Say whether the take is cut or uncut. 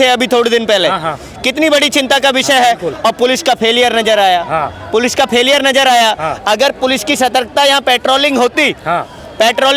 uncut